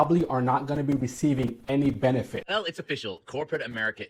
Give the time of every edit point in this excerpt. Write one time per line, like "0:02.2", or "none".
0:02.4